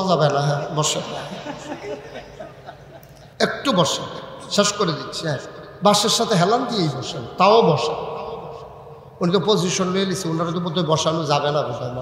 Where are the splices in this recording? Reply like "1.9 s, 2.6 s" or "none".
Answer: 3.2 s